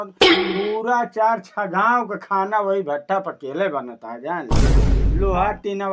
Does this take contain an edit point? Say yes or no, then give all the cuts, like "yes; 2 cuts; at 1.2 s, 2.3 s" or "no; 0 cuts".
yes; 1 cut; at 5.0 s